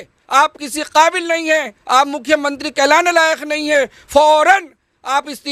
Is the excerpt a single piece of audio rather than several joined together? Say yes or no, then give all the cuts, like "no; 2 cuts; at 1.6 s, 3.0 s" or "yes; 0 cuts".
yes; 0 cuts